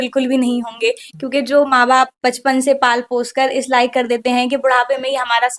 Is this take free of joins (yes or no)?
yes